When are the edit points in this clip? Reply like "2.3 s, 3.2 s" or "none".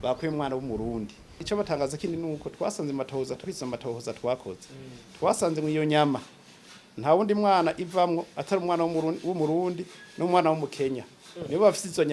1.4 s